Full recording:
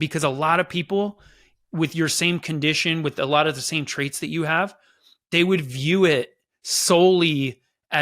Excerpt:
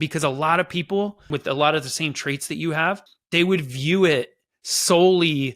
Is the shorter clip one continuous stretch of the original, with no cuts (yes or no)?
no